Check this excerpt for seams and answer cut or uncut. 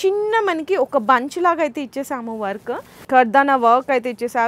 cut